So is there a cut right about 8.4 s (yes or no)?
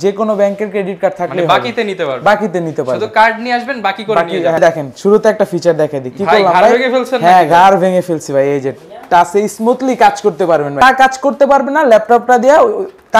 no